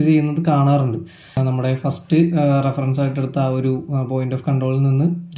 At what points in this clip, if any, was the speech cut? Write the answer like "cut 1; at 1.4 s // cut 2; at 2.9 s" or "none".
cut 1; at 1.4 s